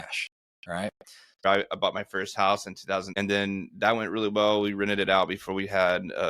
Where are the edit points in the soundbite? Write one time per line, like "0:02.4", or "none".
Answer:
0:01.4
0:03.2